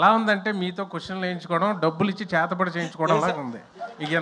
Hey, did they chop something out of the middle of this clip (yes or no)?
no